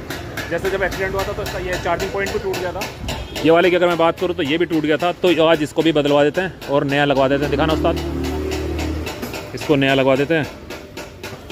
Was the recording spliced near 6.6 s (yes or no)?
no